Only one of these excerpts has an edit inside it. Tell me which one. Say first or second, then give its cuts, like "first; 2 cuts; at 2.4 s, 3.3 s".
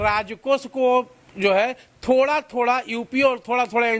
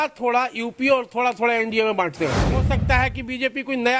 second; 1 cut; at 2.6 s